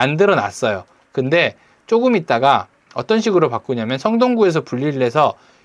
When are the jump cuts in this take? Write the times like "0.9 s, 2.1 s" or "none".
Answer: none